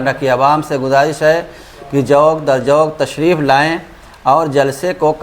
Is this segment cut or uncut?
uncut